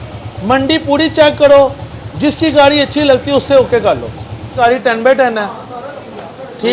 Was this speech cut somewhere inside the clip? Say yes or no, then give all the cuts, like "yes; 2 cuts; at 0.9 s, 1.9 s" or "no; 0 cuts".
yes; 1 cut; at 4.5 s